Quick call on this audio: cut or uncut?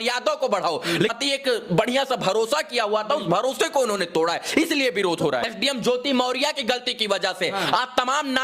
cut